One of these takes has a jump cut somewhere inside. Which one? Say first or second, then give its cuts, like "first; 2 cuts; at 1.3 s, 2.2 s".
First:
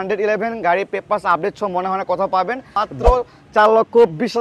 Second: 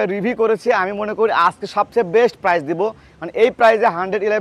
first; 1 cut; at 2.7 s